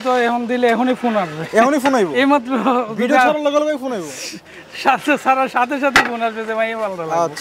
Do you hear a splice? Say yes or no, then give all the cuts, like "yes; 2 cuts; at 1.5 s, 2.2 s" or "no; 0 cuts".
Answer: no; 0 cuts